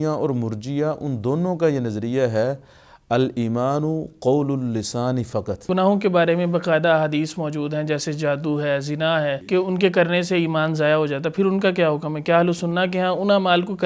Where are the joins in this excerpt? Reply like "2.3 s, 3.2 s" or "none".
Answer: 5.7 s, 9.4 s